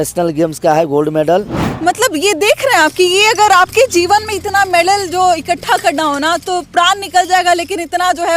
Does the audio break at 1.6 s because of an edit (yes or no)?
yes